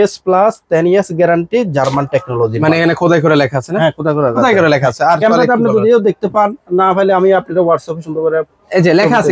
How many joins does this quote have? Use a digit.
0